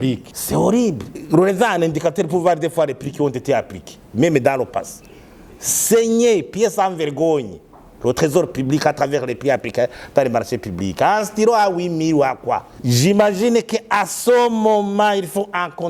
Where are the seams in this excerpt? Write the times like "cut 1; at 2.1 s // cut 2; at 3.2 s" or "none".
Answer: cut 1; at 12.7 s